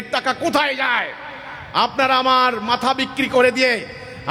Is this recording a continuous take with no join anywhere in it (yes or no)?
yes